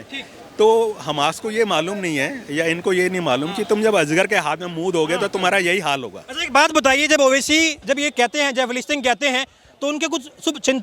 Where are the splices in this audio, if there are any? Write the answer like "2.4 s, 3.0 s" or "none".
none